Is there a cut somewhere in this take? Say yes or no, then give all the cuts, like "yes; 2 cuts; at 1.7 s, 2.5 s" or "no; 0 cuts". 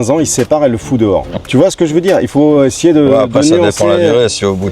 yes; 1 cut; at 1.3 s